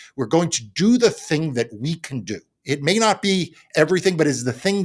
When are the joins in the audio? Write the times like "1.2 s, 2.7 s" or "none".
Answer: none